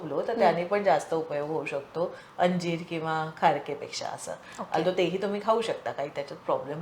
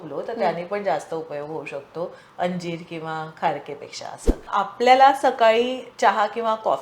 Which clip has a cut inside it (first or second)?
second